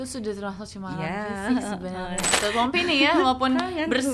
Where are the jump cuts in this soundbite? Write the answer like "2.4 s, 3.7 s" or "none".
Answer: 2.3 s